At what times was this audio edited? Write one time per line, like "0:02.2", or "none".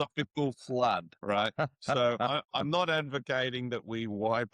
0:01.1